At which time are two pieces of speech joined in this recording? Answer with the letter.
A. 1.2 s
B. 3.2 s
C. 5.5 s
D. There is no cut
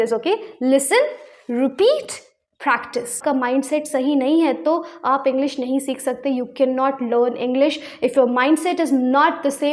B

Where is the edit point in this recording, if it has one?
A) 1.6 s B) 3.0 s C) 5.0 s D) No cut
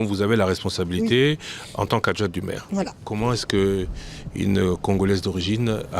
B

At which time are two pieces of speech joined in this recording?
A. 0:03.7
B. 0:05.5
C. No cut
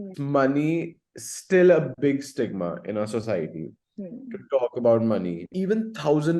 B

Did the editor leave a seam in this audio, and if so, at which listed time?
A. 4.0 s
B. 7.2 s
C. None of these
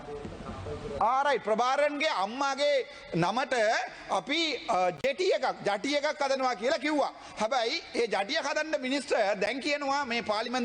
C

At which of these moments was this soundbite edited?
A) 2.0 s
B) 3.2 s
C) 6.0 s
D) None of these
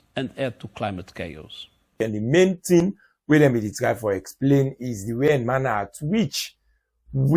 A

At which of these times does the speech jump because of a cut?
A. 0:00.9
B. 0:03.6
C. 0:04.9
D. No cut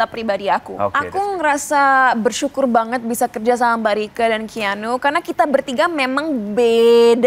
A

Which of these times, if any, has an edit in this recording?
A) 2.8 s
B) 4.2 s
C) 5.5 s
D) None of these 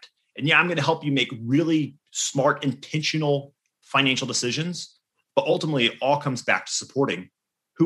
C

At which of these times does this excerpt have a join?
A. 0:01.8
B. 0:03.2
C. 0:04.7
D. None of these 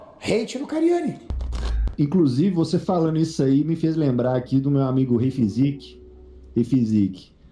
A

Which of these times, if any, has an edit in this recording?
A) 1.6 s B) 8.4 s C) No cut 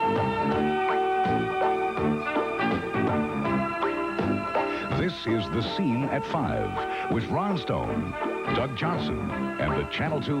A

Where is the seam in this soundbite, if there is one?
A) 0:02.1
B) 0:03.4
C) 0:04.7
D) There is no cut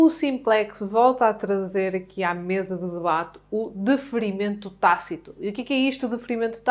D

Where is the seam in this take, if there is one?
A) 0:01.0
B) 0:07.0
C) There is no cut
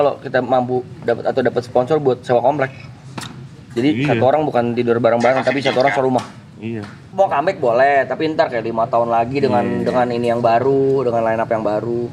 B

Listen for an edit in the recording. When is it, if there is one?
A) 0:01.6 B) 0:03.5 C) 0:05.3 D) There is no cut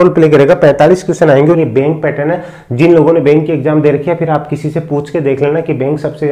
A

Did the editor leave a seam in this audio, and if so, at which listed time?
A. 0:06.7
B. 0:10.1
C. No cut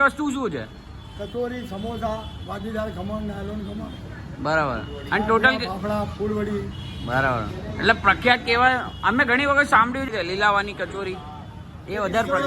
B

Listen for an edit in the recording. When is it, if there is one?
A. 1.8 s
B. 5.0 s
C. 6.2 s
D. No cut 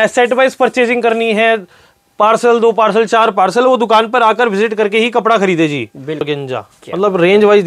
C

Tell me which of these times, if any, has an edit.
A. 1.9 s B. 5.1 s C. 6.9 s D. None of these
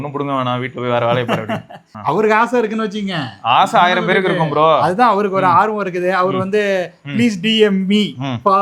A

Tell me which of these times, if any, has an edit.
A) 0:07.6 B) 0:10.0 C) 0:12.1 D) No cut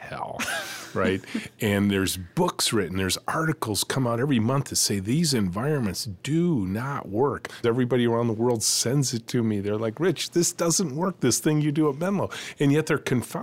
A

